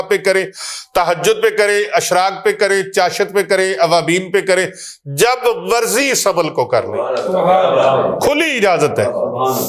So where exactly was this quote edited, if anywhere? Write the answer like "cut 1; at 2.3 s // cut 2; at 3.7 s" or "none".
none